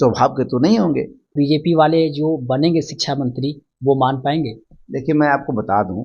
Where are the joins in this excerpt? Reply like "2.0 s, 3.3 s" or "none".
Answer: 1.3 s